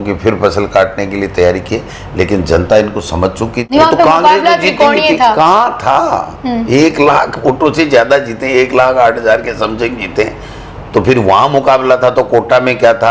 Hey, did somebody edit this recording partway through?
yes; 1 cut; at 3.6 s

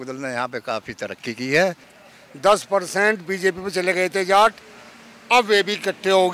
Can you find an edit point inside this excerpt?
yes; 1 cut; at 1.9 s

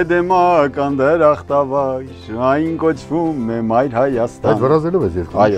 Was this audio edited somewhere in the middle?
no; 0 cuts

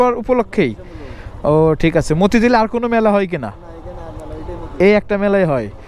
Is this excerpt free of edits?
yes; 0 cuts

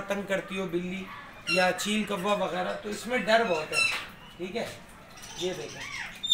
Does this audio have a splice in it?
no; 0 cuts

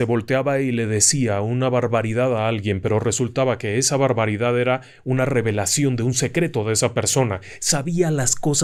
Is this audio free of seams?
yes; 0 cuts

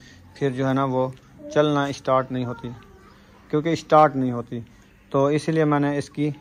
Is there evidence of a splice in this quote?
no; 0 cuts

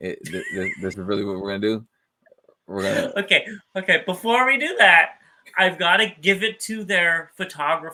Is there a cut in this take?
no; 0 cuts

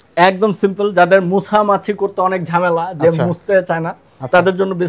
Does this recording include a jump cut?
no; 0 cuts

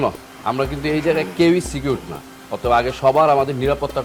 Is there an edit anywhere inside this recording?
no; 0 cuts

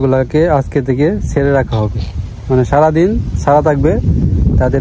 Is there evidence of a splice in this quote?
no; 0 cuts

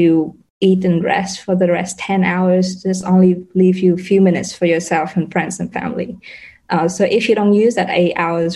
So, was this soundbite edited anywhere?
no; 0 cuts

